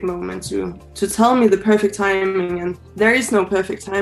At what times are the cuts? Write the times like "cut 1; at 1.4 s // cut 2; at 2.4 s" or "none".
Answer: cut 1; at 2.8 s